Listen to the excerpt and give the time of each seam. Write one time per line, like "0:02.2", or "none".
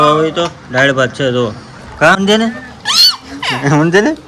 0:02.2

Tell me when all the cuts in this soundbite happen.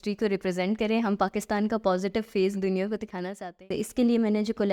0:03.6

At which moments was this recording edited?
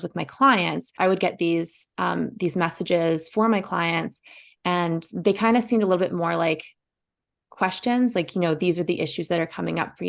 0:00.9

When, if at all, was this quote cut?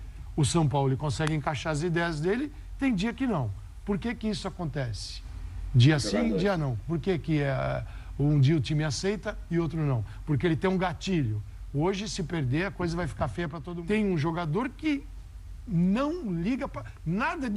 0:13.6

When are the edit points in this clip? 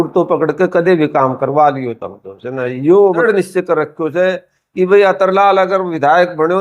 0:03.2

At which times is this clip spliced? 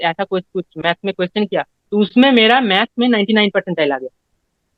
none

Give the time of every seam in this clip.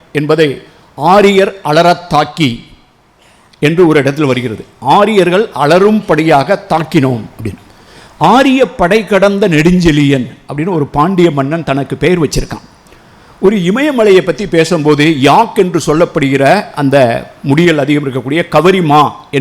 none

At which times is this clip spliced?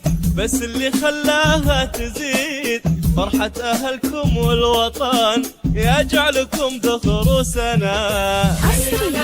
0:05.6
0:08.0

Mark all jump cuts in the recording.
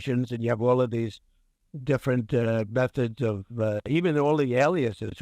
0:03.9

